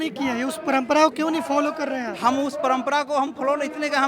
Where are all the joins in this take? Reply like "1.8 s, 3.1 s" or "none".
none

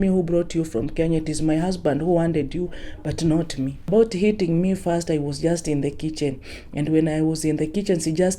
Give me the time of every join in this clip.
3.9 s

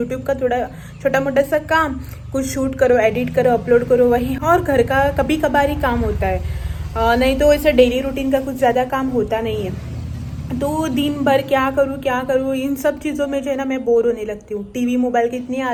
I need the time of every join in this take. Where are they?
none

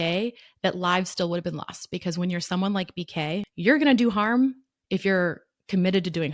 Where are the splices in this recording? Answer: 3.5 s

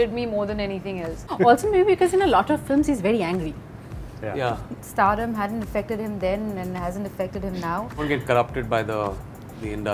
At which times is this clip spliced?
1.2 s, 4.8 s, 8.0 s

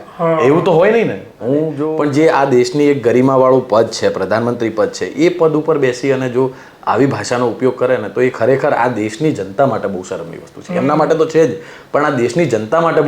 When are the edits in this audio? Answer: 1.8 s

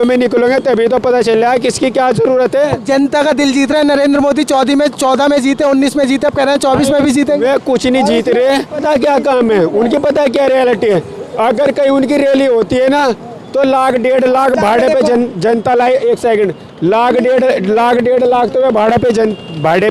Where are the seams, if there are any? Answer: 8.8 s

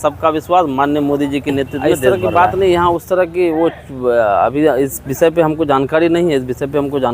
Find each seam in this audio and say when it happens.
2.2 s

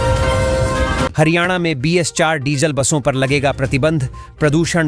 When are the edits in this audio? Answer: 1.1 s

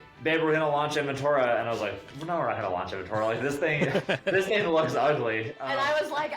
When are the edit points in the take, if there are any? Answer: 2.1 s

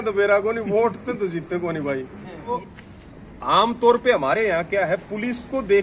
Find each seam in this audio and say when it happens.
2.6 s

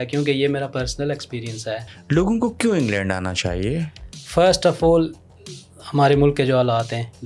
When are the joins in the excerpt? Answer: 1.9 s

